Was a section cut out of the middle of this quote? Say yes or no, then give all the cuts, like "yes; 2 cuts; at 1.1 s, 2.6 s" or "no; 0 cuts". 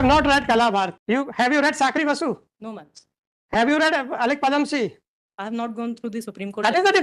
yes; 1 cut; at 1.0 s